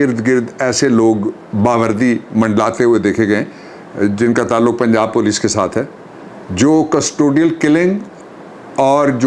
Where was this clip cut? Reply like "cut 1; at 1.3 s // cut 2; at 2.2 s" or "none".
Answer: none